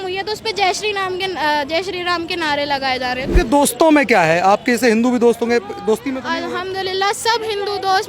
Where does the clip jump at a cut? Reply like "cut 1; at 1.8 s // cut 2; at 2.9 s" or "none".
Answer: cut 1; at 3.3 s